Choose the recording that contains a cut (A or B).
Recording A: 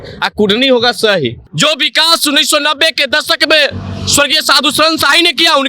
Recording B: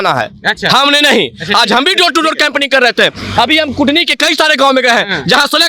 A